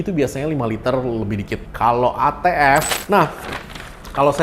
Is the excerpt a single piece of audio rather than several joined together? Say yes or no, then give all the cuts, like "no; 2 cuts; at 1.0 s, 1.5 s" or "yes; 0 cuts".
no; 1 cut; at 2.9 s